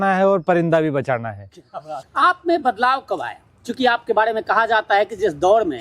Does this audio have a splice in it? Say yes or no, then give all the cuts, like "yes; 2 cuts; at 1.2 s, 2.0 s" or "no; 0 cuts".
yes; 1 cut; at 2.0 s